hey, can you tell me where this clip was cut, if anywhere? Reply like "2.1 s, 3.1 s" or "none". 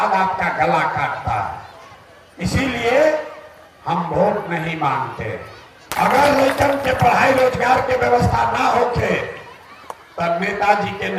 5.9 s